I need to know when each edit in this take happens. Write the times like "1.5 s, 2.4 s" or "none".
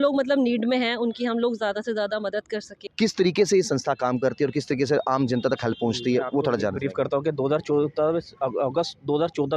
2.9 s